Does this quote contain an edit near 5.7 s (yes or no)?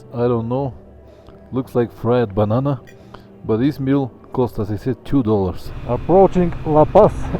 yes